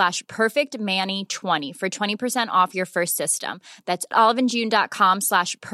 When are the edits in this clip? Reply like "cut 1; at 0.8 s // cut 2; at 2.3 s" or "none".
cut 1; at 1.7 s